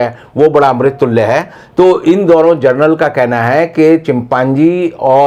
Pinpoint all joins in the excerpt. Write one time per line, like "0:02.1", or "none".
none